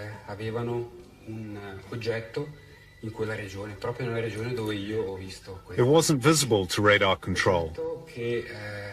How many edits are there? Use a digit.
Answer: 0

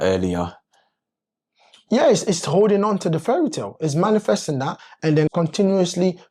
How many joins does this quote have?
1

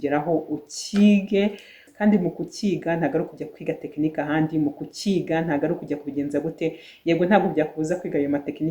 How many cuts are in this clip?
1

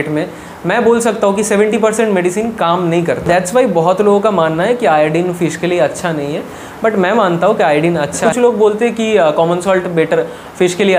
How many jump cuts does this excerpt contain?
2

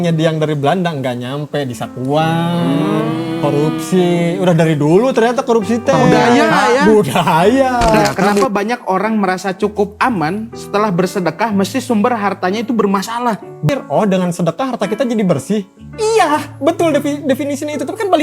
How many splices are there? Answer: 2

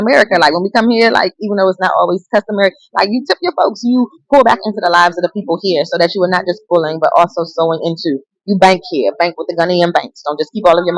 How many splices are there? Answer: 0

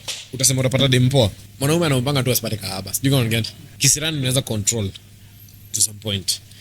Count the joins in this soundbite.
2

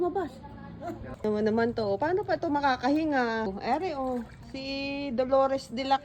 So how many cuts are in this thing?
1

